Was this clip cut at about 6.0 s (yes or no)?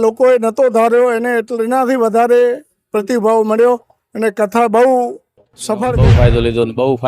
yes